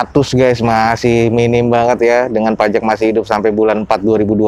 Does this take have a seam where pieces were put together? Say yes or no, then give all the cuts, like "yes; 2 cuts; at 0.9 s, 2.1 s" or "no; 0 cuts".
no; 0 cuts